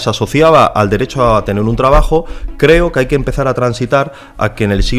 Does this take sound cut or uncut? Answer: uncut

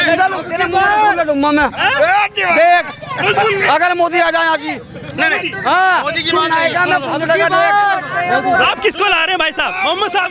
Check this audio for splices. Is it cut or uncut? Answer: uncut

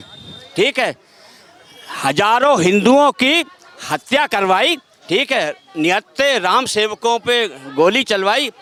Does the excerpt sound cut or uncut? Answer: uncut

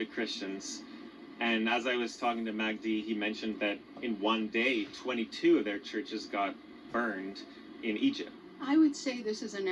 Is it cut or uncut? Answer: cut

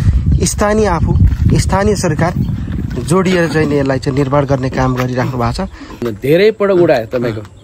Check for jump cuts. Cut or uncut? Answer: cut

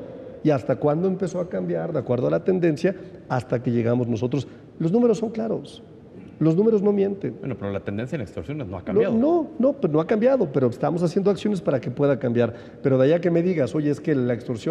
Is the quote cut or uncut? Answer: uncut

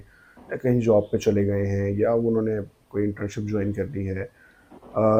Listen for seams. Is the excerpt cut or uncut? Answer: uncut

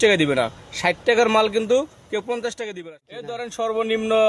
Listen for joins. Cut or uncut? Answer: cut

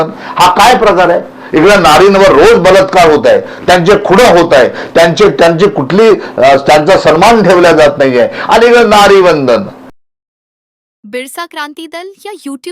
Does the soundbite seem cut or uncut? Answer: cut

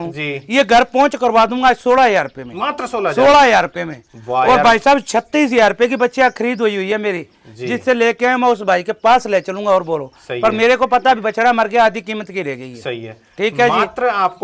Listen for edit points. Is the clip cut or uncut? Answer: uncut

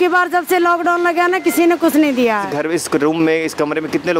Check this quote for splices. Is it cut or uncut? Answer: cut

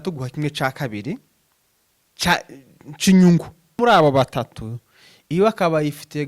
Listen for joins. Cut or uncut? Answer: cut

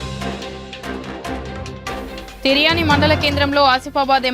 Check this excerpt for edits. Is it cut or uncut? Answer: cut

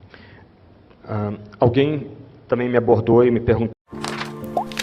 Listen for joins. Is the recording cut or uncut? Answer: uncut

